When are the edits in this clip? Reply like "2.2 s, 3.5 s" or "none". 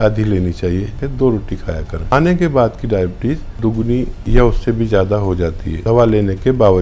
1.0 s, 2.1 s, 3.8 s, 5.7 s

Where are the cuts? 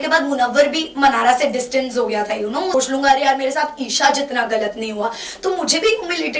2.7 s

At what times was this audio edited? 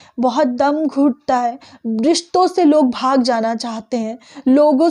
none

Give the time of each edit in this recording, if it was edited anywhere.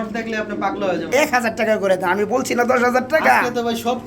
1.1 s

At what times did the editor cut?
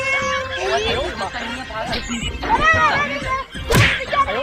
none

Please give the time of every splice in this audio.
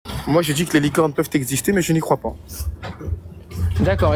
none

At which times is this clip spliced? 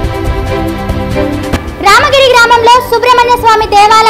1.5 s

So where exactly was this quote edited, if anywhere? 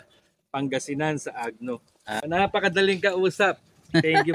2.2 s

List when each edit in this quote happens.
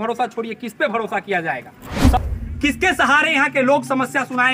2.2 s

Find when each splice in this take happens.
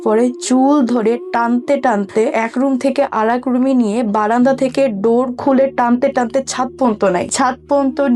2.3 s, 7.3 s

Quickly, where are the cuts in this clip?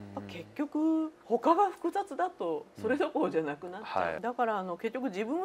4.2 s

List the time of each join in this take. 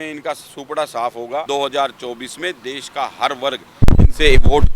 1.5 s

